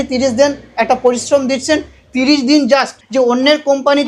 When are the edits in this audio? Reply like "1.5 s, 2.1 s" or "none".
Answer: 3.0 s